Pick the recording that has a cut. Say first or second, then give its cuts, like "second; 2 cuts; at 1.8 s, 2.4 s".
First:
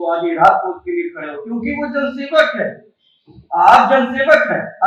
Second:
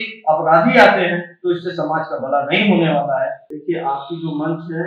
second; 1 cut; at 3.4 s